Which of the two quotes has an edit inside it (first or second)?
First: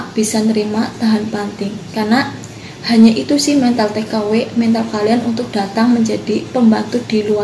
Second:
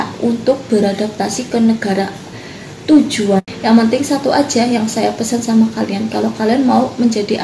second